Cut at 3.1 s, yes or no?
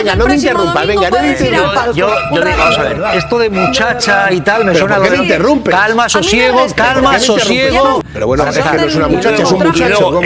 no